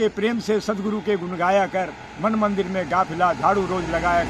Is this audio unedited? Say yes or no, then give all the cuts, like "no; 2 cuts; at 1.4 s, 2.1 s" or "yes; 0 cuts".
yes; 0 cuts